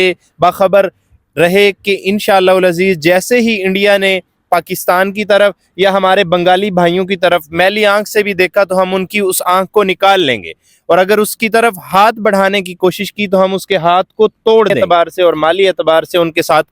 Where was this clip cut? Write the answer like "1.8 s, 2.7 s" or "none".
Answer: 14.7 s